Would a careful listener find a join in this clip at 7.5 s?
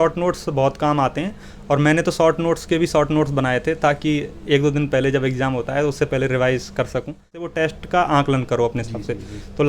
yes; 1 cut; at 7.5 s

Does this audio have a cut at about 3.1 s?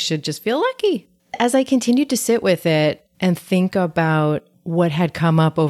no; 2 cuts; at 1.4 s, 4.5 s

